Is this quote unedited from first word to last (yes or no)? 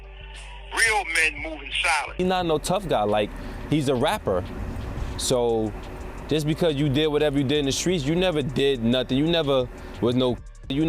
no